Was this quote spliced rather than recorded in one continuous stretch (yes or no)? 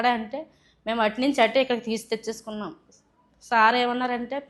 no